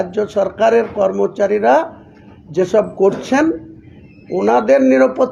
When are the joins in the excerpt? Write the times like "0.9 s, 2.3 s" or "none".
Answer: none